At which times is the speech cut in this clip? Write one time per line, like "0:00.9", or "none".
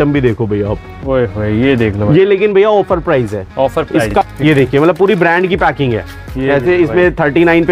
0:04.0